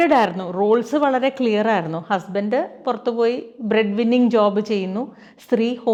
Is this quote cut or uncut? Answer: uncut